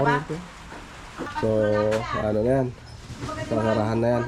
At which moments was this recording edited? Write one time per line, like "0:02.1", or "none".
0:01.3